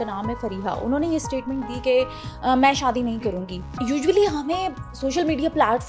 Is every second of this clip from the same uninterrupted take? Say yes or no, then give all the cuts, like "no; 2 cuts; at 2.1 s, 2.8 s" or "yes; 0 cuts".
no; 1 cut; at 3.7 s